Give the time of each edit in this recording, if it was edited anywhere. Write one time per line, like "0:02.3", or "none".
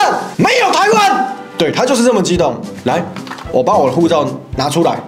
none